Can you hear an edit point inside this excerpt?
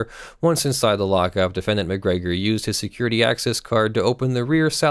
no; 0 cuts

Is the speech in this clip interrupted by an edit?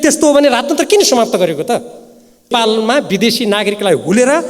yes; 1 cut; at 2.5 s

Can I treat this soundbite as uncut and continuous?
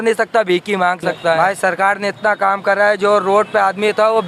no; 1 cut; at 1.4 s

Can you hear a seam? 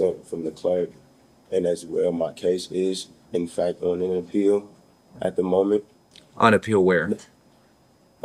no; 0 cuts

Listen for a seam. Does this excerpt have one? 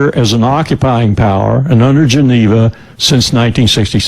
yes; 1 cut; at 2.8 s

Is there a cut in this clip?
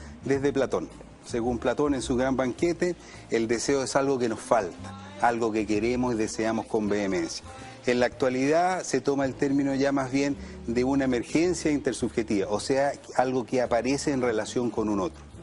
yes; 1 cut; at 0.9 s

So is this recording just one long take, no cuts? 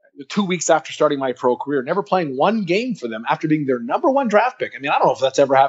yes; 0 cuts

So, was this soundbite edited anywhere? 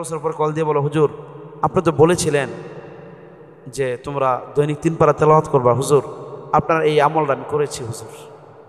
no; 0 cuts

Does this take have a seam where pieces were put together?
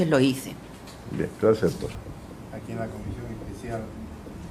yes; 1 cut; at 2.0 s

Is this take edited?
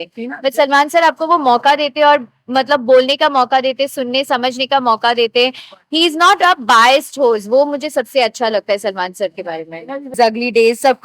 yes; 1 cut; at 10.1 s

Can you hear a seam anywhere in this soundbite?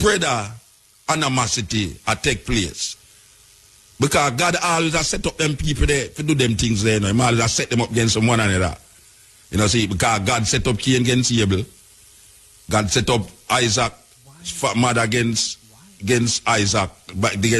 no; 0 cuts

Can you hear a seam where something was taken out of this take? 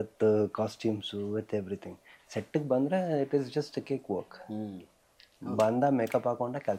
no; 0 cuts

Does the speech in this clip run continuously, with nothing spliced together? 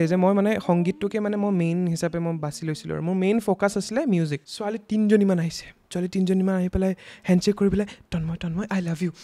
no; 1 cut; at 4.5 s

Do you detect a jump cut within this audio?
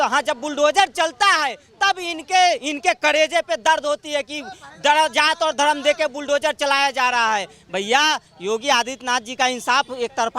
no; 0 cuts

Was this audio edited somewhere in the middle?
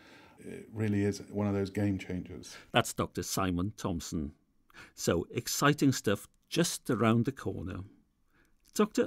no; 0 cuts

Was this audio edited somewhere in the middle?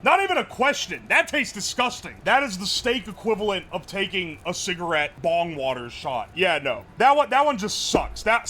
yes; 2 cuts; at 2.1 s, 6.3 s

